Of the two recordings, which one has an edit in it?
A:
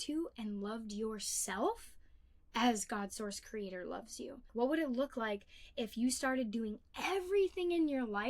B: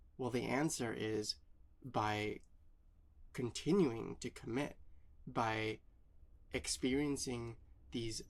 A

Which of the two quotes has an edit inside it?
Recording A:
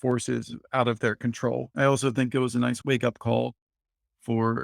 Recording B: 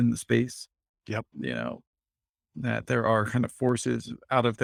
A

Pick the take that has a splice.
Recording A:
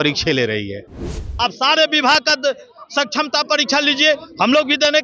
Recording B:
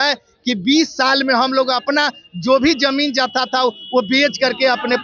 A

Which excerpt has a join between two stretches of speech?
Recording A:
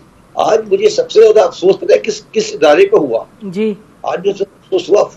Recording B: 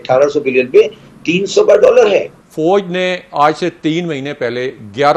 B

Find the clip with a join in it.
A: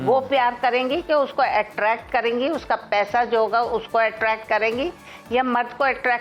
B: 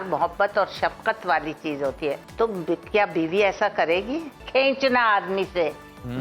B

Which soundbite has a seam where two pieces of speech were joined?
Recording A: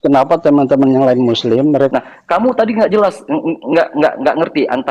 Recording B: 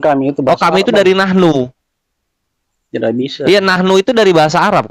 A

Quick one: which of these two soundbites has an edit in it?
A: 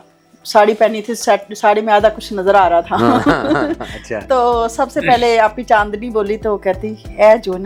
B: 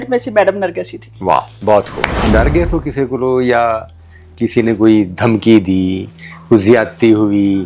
B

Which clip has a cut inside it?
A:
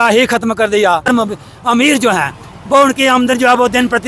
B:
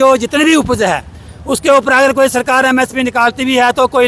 A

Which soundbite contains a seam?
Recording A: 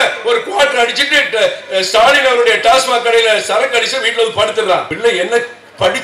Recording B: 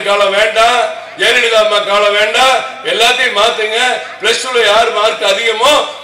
A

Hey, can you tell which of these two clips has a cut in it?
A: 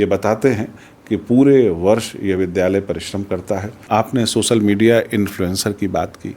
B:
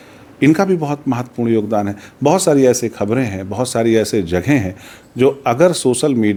A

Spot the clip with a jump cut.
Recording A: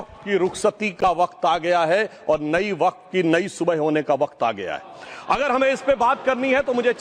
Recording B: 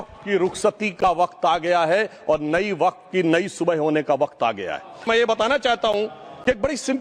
B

